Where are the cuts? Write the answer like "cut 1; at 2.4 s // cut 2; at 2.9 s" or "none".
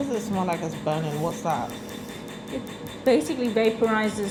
none